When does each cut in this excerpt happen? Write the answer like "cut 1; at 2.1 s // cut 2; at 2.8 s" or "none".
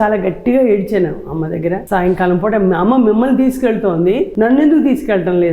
cut 1; at 1.8 s // cut 2; at 4.3 s